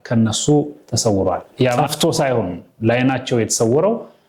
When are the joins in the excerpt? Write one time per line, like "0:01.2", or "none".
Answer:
0:01.8